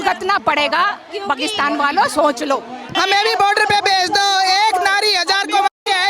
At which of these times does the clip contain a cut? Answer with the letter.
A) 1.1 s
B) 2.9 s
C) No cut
B